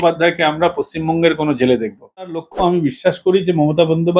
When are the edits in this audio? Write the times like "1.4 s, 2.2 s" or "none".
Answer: 2.5 s